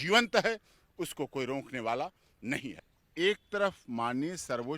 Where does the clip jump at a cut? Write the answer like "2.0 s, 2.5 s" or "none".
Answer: 2.8 s